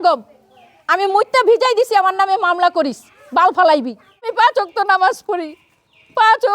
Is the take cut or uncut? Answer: cut